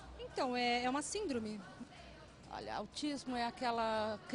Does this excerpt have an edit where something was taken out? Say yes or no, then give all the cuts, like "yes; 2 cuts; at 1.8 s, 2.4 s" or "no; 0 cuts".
yes; 1 cut; at 1.7 s